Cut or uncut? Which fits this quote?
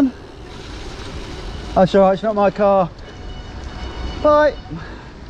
uncut